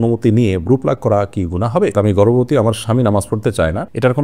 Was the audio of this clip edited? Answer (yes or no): yes